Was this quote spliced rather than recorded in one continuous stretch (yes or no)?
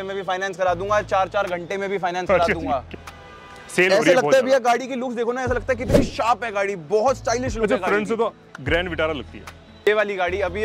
yes